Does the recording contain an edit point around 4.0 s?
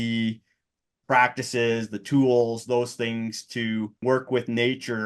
yes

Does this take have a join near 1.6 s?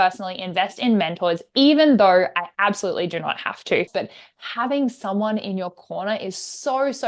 no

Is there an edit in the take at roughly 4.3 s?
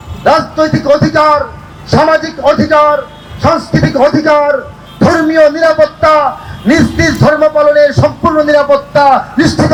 no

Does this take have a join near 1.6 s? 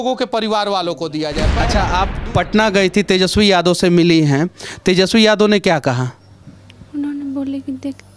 yes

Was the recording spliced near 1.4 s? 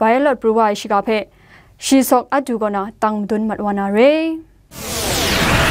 no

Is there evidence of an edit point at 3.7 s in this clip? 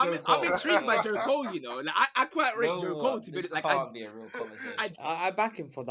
no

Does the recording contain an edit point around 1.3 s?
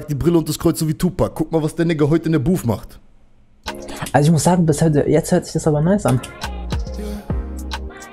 no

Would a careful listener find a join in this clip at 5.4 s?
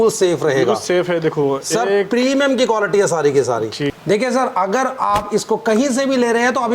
no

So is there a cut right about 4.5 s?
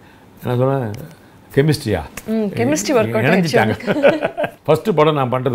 yes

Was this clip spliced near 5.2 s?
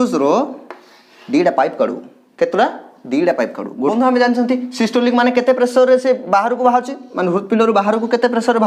no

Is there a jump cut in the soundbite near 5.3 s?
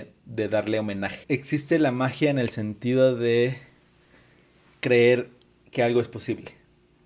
no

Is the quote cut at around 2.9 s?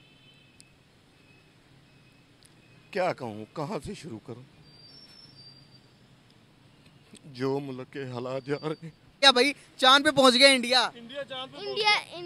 no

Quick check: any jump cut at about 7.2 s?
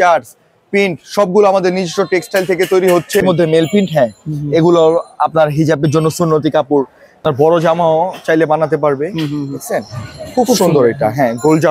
yes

